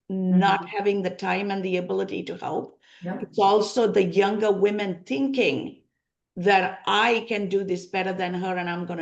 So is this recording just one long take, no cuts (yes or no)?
yes